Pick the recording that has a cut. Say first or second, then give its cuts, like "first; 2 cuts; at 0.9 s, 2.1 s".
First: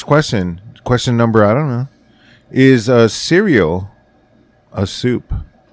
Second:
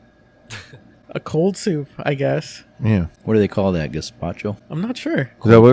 second; 3 cuts; at 1.0 s, 3.1 s, 4.6 s